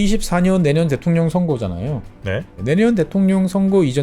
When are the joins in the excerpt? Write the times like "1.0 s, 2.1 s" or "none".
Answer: 2.6 s